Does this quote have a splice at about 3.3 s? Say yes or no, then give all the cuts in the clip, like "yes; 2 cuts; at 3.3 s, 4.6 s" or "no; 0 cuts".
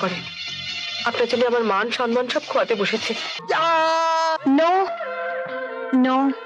yes; 1 cut; at 3.3 s